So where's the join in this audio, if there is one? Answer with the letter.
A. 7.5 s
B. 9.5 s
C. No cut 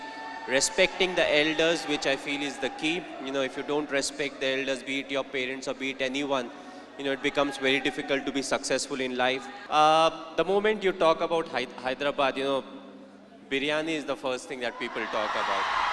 B